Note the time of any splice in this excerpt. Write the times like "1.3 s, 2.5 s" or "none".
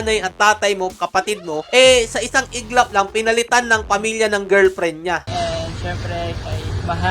5.3 s

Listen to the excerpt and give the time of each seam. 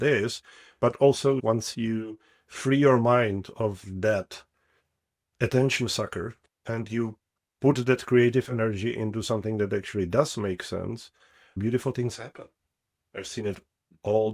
1.4 s, 11.5 s

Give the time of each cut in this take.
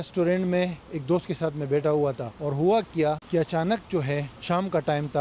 2.3 s, 3.2 s, 4.3 s

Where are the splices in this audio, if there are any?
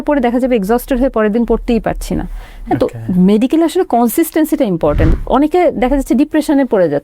5.1 s

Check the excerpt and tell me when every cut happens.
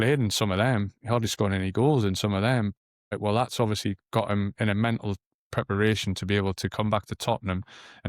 none

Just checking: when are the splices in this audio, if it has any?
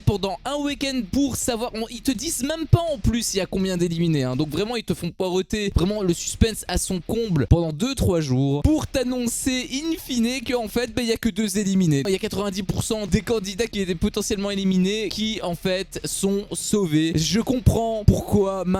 12.0 s

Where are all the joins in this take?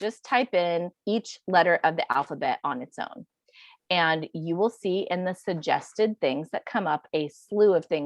0.9 s

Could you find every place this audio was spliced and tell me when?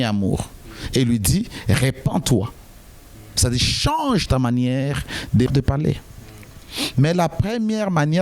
5.5 s

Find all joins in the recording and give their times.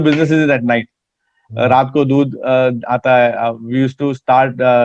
none

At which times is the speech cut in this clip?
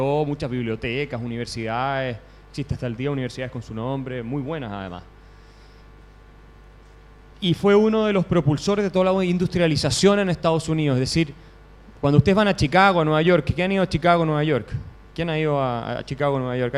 none

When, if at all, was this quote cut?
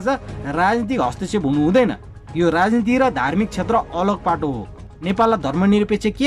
4.9 s

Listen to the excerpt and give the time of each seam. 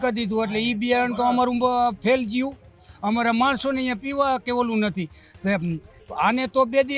none

